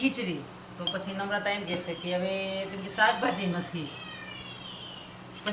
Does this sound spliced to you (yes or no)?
no